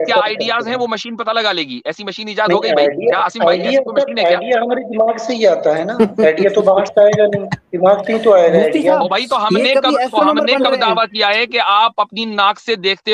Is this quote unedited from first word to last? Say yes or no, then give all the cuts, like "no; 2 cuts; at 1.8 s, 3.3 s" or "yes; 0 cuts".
yes; 0 cuts